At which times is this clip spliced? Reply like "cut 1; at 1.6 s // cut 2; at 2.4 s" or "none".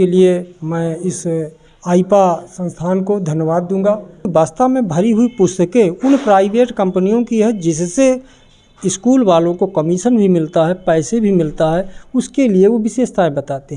cut 1; at 4.3 s